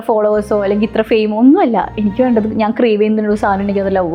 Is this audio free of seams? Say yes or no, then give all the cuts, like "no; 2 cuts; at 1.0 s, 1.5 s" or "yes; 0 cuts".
yes; 0 cuts